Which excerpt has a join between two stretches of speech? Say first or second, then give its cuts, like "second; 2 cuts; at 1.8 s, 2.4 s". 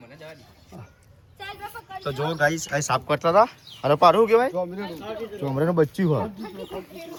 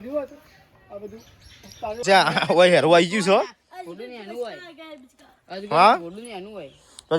second; 1 cut; at 2.0 s